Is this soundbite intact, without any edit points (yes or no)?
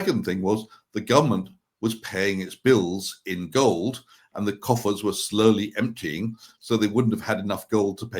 yes